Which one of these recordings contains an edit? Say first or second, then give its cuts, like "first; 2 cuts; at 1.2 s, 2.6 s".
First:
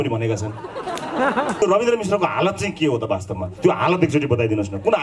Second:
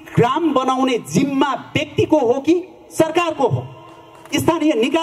first; 1 cut; at 1.6 s